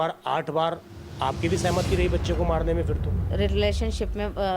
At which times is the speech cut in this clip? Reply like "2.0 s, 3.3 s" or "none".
3.3 s